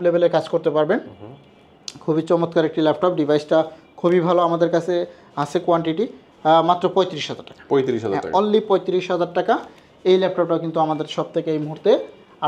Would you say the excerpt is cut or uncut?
uncut